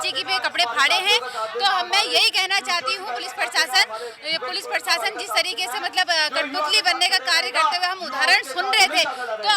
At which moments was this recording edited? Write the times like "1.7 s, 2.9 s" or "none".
none

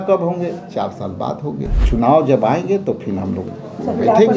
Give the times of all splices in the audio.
1.8 s

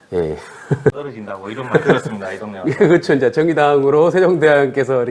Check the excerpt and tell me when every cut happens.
1.1 s

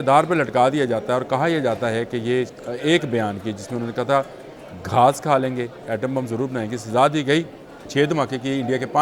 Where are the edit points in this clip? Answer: 2.5 s, 7.8 s

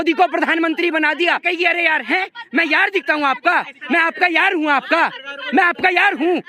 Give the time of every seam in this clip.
1.4 s

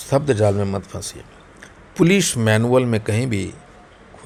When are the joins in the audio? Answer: none

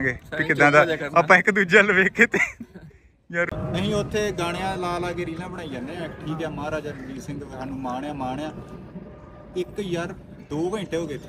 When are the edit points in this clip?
3.5 s

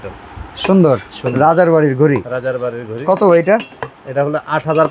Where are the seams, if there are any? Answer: none

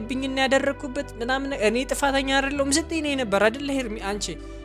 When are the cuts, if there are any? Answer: none

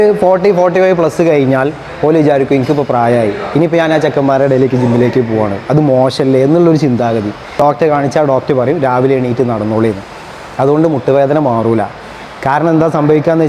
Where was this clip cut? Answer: 7.4 s

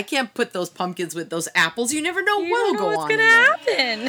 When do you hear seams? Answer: 2.8 s

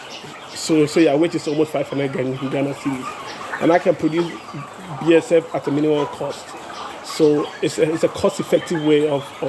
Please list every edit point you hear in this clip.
none

